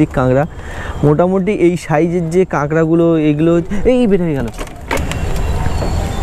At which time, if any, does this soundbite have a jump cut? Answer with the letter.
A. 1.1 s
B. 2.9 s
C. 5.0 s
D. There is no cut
C